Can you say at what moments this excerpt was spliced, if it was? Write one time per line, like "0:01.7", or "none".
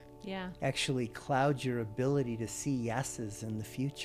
none